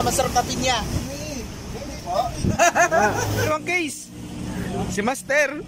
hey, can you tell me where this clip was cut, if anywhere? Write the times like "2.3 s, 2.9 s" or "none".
0.9 s, 2.6 s, 3.5 s